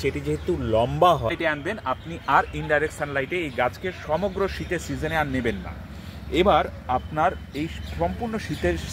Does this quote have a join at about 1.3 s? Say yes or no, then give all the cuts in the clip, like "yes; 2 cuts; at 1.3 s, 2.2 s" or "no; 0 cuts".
yes; 1 cut; at 1.3 s